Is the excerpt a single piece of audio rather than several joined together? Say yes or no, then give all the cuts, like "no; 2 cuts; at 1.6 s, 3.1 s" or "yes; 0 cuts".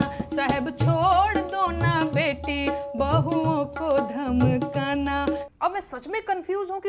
no; 1 cut; at 5.5 s